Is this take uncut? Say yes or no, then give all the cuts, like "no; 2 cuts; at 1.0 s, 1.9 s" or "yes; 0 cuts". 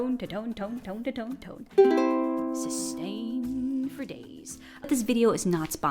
no; 1 cut; at 4.8 s